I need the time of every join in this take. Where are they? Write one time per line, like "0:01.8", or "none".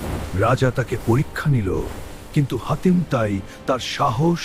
none

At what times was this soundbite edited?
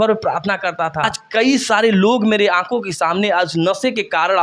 0:01.2

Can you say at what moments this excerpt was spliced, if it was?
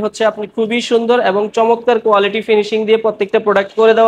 none

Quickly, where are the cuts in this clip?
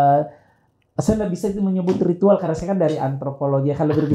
none

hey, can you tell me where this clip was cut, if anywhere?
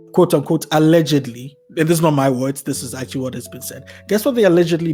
none

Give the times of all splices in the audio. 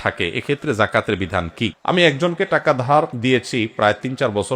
0:01.8

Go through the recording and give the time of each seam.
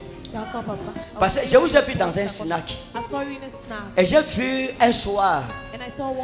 none

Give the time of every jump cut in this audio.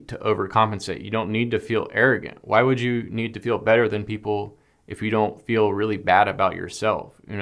none

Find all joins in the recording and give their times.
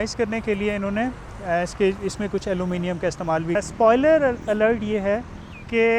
0:03.5

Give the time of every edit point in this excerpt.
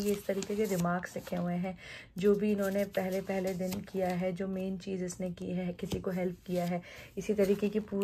none

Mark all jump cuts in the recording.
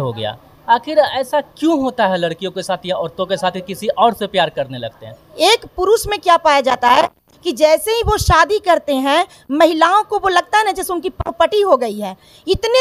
0:05.3

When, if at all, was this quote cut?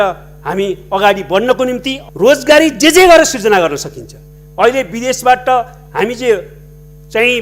0:01.9

